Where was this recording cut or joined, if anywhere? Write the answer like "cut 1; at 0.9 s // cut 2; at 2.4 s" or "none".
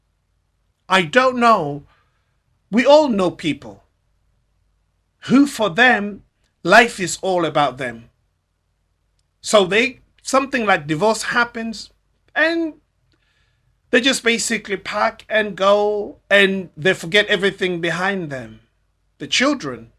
none